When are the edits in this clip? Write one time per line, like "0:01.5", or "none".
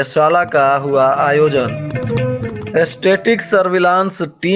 none